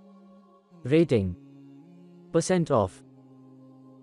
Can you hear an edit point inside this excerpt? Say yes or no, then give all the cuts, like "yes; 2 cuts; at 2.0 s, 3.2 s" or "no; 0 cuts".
no; 0 cuts